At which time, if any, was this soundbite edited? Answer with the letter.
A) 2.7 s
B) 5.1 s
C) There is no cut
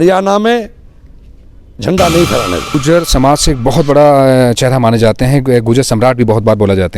A